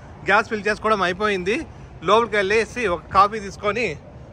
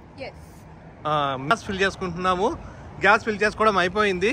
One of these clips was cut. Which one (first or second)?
second